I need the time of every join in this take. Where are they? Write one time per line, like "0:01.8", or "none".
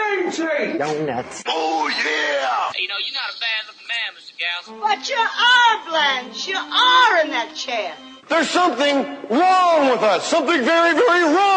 0:07.8